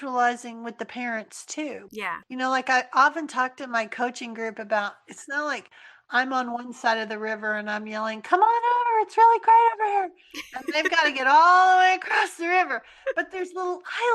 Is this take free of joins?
no; 1 cut; at 2.1 s

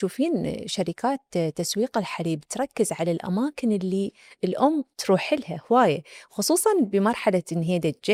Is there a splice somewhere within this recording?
no; 0 cuts

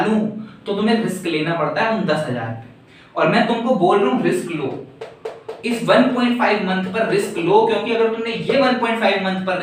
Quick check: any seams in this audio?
no; 0 cuts

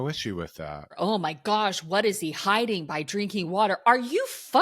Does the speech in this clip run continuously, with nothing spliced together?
no; 1 cut; at 0.9 s

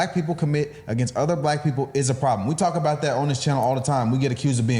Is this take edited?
no; 0 cuts

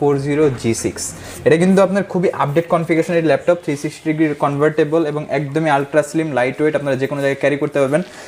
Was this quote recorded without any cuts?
yes; 0 cuts

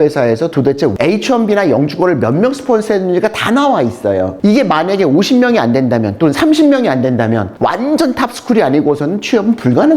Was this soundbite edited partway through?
yes; 2 cuts; at 0.9 s, 7.5 s

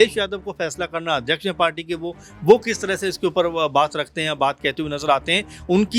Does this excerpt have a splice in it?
no; 0 cuts

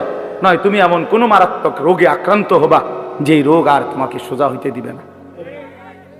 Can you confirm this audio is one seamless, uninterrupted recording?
yes; 0 cuts

